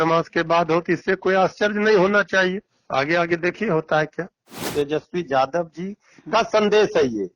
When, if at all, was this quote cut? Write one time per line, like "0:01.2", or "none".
0:04.7